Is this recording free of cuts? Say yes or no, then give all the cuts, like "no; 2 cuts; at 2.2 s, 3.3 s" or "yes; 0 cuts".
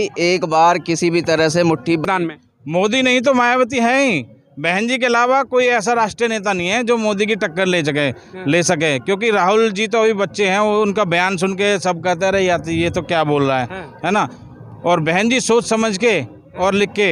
no; 1 cut; at 2.0 s